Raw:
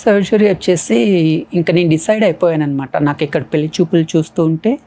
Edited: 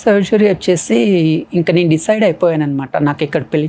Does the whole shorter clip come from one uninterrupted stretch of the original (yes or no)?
yes